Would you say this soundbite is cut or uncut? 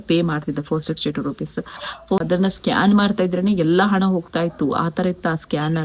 cut